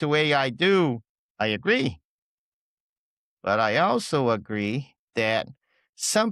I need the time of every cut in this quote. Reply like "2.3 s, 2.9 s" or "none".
none